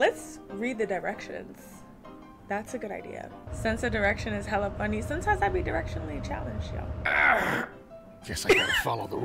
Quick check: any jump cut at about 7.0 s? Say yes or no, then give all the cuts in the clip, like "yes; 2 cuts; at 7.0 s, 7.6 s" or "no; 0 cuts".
yes; 2 cuts; at 3.5 s, 7.0 s